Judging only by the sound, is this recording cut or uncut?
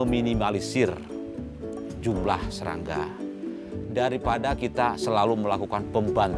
uncut